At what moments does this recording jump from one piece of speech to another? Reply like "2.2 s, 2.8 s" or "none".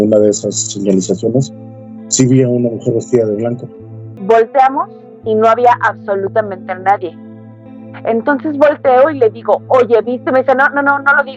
4.2 s

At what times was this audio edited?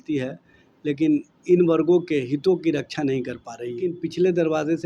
3.9 s

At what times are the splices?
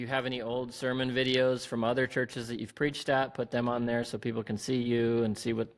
none

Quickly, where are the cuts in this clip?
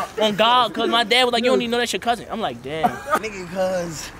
3.2 s

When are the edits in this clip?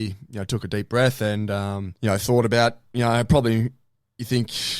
1.9 s

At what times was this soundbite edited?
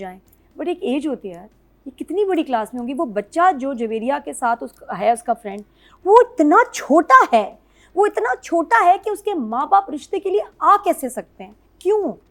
none

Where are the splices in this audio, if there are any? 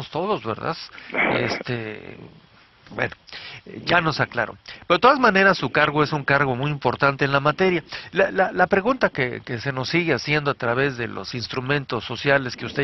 5.4 s

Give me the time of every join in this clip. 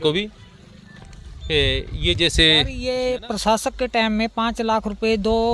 2.8 s

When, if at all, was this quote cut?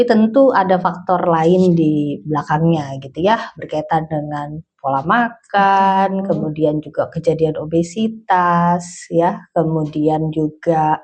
none

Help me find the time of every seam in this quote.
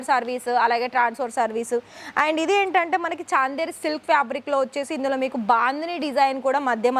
none

